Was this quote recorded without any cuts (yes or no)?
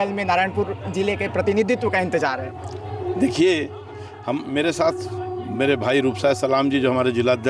yes